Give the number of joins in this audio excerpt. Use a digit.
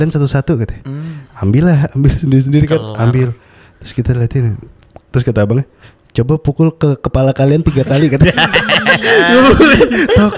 0